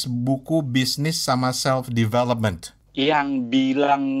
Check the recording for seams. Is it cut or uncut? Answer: uncut